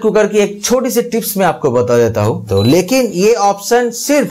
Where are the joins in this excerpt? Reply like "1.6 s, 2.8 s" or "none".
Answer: 2.4 s